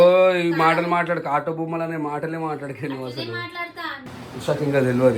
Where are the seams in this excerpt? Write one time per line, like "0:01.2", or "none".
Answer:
0:04.0

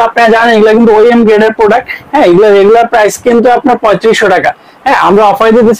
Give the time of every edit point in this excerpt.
none

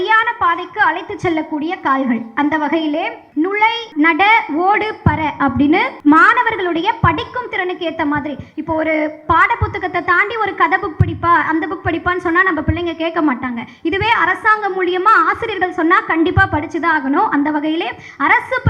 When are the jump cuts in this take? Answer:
0:03.7
0:05.9

